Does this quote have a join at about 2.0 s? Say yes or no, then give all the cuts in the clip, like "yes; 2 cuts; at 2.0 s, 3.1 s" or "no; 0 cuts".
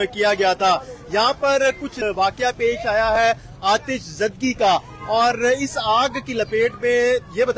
yes; 1 cut; at 2.0 s